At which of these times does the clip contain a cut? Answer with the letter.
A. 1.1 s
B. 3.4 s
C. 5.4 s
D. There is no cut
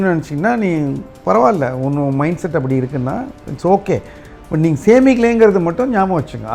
D